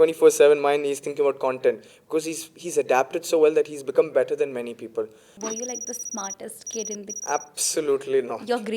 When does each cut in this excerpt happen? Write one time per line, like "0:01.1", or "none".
0:05.3